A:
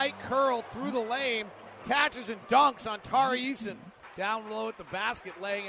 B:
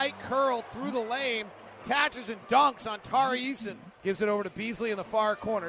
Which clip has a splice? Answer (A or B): B